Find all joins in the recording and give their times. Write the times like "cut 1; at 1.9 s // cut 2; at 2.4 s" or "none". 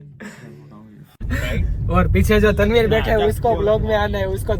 cut 1; at 1.2 s